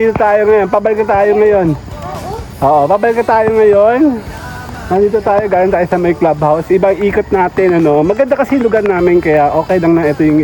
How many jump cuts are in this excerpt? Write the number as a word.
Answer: zero